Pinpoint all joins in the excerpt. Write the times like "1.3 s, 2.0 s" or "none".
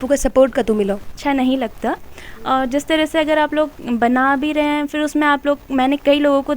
1.2 s